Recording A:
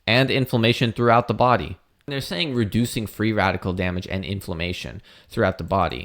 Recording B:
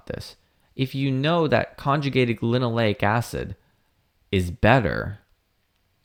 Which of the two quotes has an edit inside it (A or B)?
A